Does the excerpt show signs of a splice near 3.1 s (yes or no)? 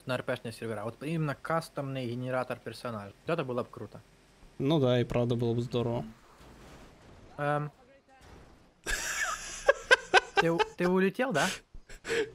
yes